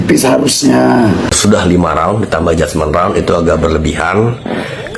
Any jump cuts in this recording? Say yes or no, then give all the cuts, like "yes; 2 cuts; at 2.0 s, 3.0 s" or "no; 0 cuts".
yes; 1 cut; at 1.3 s